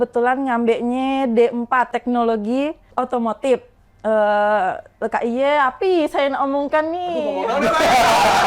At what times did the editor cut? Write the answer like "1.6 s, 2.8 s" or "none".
1.9 s, 2.8 s